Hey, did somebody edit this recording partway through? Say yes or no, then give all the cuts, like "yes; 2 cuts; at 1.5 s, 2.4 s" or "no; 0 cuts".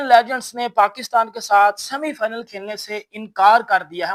no; 0 cuts